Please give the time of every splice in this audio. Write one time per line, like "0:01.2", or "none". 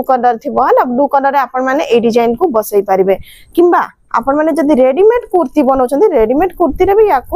none